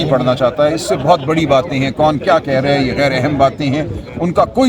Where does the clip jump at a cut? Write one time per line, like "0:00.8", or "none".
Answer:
none

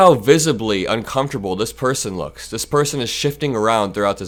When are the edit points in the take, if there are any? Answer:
none

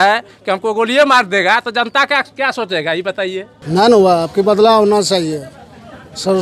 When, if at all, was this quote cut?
0:03.5

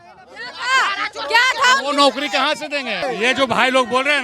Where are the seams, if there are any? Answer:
0:03.0

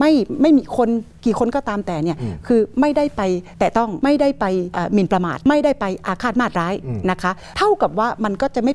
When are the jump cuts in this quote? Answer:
0:03.8
0:05.0
0:07.4

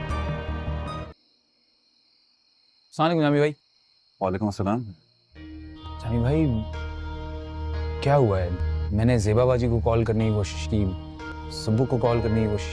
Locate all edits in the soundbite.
0:01.0

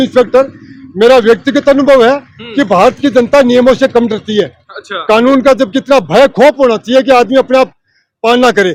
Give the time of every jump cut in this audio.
none

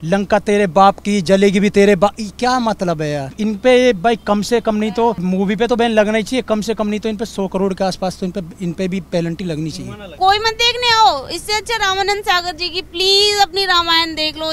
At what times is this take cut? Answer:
0:03.3
0:05.2
0:10.2

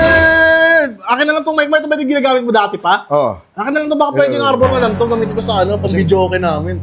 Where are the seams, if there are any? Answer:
none

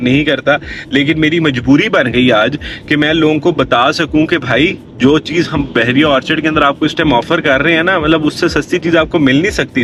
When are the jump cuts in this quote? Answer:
none

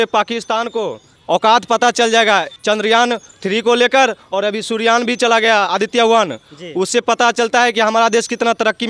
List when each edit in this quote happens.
0:01.1
0:02.5
0:03.3

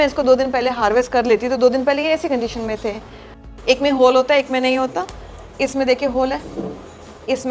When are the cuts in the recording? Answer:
0:03.4

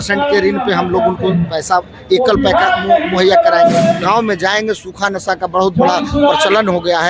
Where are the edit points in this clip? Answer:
0:04.0

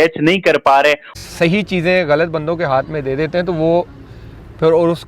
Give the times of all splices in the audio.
0:01.1

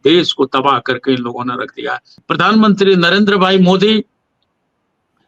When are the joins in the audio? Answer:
0:02.1

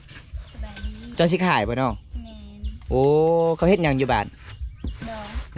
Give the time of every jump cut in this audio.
0:01.0

